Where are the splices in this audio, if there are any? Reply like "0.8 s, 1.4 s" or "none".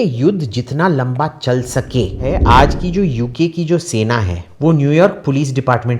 2.2 s, 4.4 s